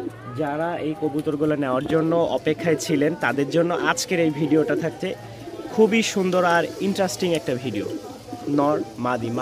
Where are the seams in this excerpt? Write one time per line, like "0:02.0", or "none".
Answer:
none